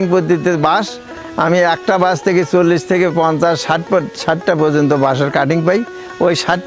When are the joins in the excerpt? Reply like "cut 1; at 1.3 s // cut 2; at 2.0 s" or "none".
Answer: none